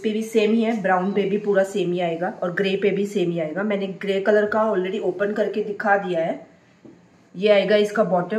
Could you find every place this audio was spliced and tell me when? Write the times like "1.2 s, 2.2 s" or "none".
none